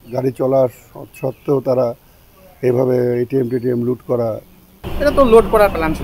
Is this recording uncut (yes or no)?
no